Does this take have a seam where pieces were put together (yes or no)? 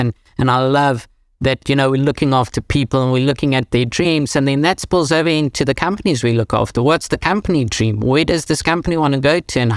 no